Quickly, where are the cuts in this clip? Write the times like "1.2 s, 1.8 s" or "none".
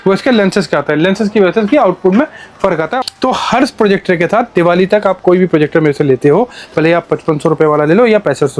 2.9 s